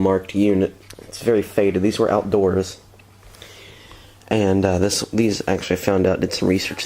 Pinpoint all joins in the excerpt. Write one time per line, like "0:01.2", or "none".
none